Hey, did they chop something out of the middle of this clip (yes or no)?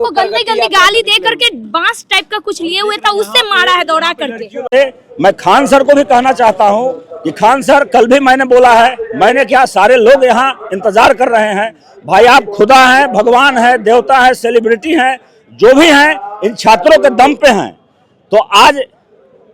yes